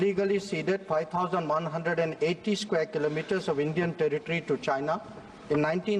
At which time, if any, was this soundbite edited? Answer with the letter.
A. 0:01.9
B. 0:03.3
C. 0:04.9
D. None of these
D